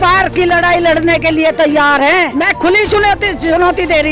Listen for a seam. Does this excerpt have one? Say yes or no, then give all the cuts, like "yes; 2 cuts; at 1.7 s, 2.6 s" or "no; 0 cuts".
yes; 1 cut; at 2.3 s